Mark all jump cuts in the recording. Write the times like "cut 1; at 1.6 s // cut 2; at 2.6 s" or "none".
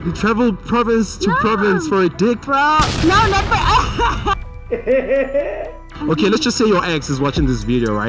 cut 1; at 5.9 s